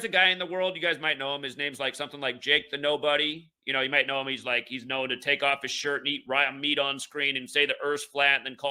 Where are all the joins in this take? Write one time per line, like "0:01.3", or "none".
none